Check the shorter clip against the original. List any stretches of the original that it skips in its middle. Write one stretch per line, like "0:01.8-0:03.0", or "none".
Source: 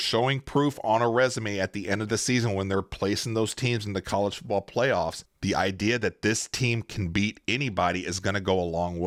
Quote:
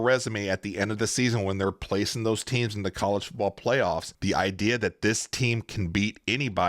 0:05.2-0:05.3